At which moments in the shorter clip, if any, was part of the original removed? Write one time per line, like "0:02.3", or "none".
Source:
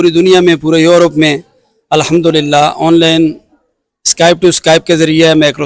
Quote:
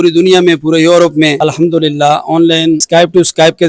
0:01.4
0:02.8